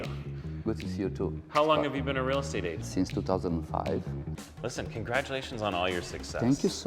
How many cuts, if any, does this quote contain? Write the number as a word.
one